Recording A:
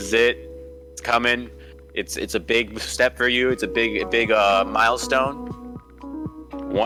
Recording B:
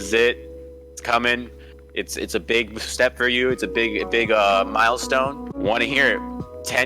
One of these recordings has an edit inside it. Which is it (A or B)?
B